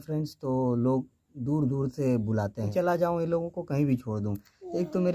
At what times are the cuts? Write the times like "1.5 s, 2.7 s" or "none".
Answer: 2.7 s